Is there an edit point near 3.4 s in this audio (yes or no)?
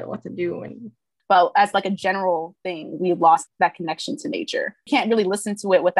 yes